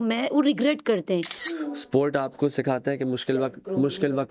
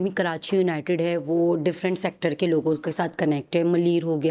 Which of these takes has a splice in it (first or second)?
first